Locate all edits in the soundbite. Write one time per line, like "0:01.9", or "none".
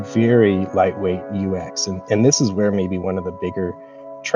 none